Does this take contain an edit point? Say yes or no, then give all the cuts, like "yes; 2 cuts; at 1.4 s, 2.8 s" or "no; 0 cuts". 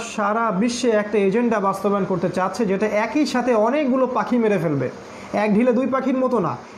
no; 0 cuts